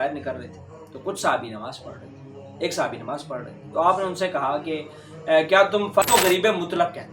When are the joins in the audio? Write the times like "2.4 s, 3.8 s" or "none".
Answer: 6.0 s